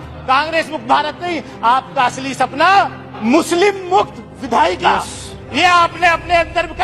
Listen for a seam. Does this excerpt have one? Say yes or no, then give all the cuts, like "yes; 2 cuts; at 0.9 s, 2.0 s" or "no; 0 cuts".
yes; 1 cut; at 3.1 s